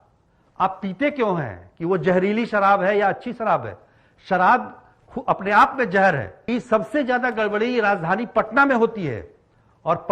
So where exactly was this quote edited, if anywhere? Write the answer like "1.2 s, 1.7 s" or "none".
6.3 s